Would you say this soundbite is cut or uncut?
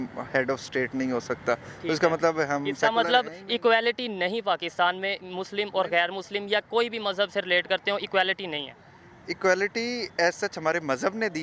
uncut